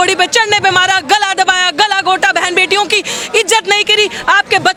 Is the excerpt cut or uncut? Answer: uncut